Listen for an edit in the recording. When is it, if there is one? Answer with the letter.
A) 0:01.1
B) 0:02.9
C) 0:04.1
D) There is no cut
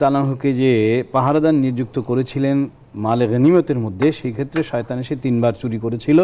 D